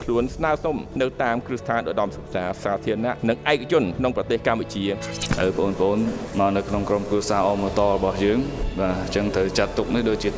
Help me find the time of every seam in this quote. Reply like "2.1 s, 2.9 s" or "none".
5.2 s